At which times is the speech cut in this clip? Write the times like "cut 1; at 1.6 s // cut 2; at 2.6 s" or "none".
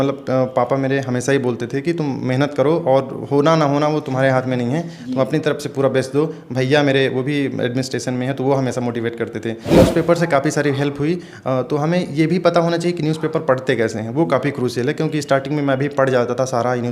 cut 1; at 9.7 s